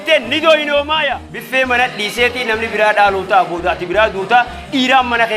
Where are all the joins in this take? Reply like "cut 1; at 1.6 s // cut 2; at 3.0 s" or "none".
cut 1; at 1.3 s